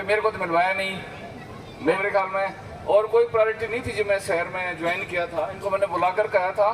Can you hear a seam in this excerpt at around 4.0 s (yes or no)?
no